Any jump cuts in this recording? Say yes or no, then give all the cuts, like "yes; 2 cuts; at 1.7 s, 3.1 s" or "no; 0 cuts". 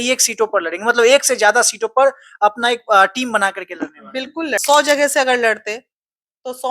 yes; 1 cut; at 4.6 s